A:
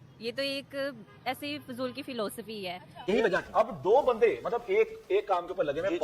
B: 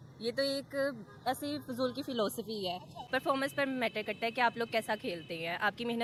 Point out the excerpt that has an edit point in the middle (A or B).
A